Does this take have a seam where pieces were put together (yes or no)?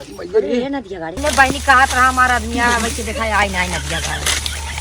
yes